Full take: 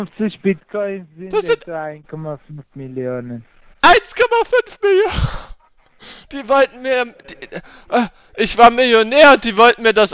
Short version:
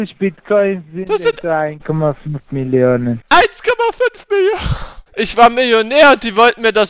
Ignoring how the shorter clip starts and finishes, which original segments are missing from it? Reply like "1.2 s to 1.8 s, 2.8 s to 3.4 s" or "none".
3.5 s to 3.7 s, 5.5 s to 8.2 s